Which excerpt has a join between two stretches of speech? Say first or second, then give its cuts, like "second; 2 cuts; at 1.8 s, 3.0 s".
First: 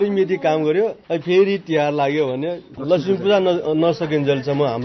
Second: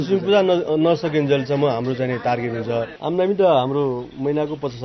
second; 1 cut; at 2.9 s